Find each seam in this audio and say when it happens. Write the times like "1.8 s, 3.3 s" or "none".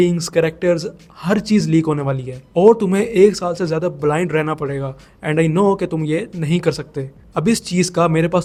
none